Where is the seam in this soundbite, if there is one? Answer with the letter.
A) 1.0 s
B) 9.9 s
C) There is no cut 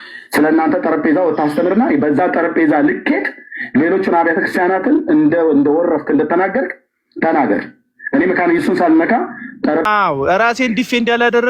B